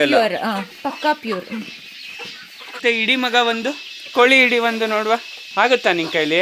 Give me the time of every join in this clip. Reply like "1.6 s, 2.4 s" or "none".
2.8 s, 5.4 s